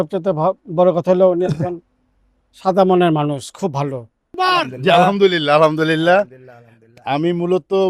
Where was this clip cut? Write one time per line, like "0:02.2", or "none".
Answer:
0:04.3